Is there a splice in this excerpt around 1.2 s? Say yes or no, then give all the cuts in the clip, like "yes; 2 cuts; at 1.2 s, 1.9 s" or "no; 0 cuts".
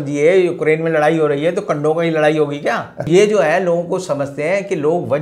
no; 1 cut; at 3.1 s